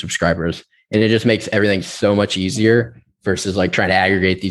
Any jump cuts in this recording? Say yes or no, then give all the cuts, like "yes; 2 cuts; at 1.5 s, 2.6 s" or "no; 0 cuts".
no; 0 cuts